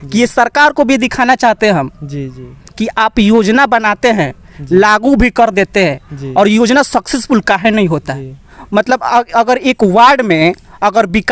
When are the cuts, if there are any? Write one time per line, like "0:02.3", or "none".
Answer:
0:08.2